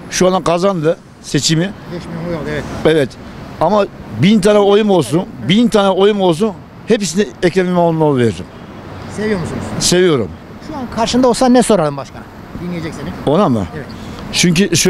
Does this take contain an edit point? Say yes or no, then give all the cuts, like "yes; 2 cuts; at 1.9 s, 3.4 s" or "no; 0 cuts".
no; 0 cuts